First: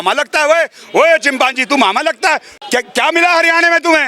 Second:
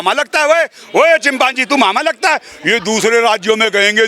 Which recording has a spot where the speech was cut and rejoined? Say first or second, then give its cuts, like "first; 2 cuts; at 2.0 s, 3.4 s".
first; 1 cut; at 2.5 s